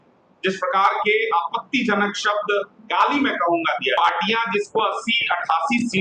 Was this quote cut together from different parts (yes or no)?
yes